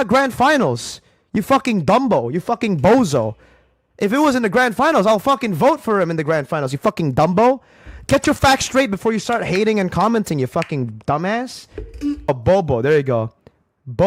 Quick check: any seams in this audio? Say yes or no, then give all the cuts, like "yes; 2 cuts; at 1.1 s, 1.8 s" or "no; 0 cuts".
yes; 1 cut; at 12.3 s